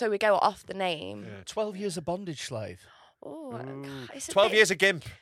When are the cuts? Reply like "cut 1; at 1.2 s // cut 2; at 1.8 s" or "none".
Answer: cut 1; at 1.3 s